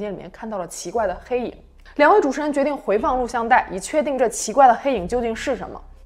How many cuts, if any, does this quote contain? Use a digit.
0